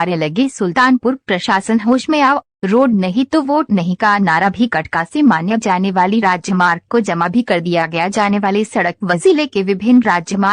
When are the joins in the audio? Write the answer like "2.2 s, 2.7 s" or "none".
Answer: 3.7 s